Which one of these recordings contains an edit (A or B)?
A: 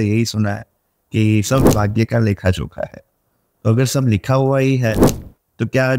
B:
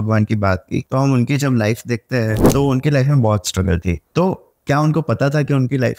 B